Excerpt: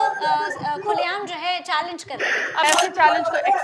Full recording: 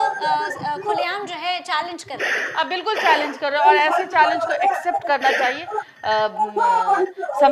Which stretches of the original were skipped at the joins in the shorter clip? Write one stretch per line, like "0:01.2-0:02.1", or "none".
0:02.6-0:03.8